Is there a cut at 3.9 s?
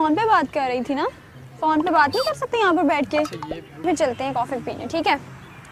yes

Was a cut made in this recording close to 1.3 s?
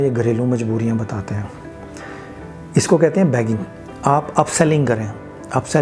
no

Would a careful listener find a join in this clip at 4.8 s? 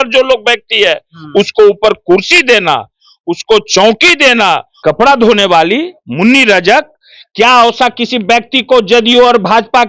yes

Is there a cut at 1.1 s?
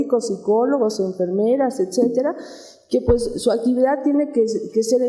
yes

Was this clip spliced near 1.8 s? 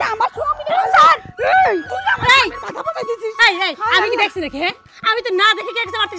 no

